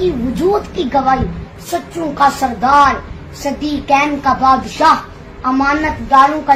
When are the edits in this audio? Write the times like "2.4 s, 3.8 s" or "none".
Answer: none